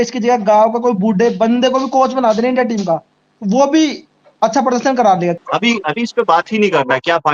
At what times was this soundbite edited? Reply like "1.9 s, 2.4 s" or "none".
5.4 s